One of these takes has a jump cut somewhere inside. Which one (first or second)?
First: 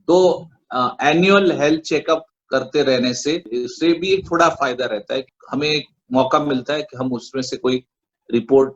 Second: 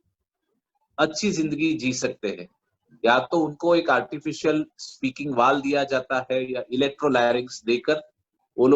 first